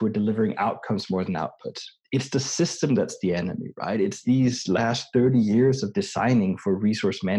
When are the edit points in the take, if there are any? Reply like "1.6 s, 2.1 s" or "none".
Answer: none